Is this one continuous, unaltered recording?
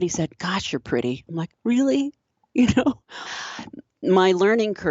no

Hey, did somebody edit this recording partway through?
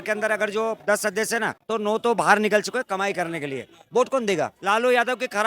yes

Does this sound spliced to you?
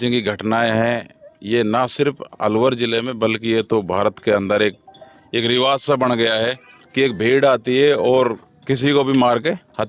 no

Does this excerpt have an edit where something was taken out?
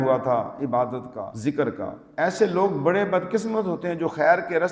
yes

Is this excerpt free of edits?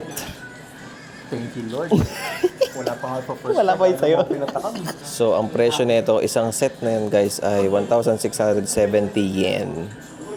yes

